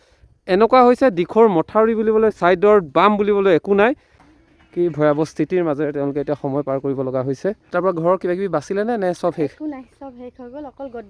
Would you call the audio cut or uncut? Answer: cut